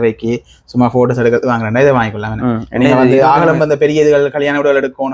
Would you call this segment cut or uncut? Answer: uncut